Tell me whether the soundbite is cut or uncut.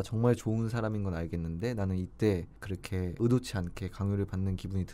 cut